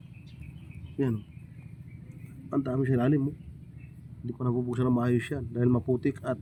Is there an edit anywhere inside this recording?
no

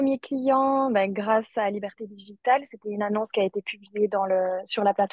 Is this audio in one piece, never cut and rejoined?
yes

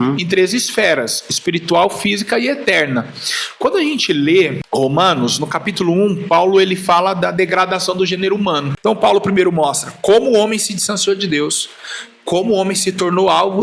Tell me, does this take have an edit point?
yes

